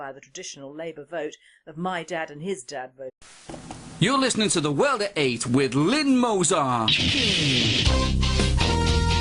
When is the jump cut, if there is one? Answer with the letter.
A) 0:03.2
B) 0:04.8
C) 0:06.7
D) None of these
D